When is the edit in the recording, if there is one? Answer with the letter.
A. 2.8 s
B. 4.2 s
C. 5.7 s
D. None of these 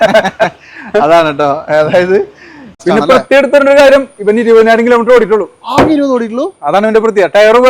A